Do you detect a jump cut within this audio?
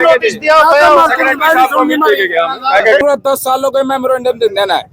yes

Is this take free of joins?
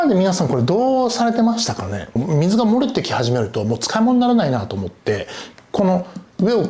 no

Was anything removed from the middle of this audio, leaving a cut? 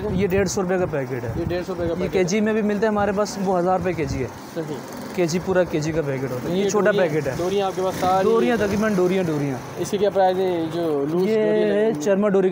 no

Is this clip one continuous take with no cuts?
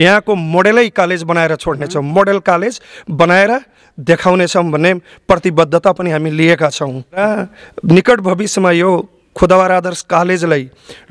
no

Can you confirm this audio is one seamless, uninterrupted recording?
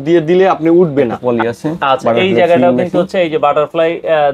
no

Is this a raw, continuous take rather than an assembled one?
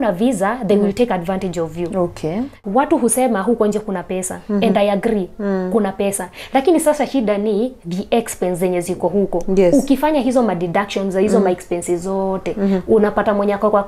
no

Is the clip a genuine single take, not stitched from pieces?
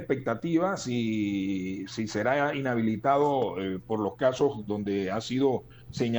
yes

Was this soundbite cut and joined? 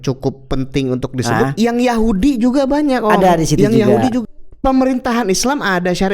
yes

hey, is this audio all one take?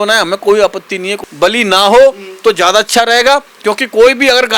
no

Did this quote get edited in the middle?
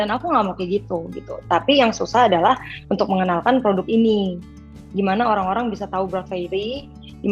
yes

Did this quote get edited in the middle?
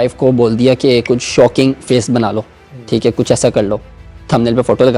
no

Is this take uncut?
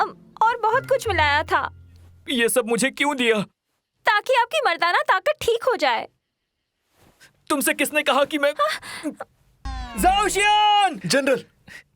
no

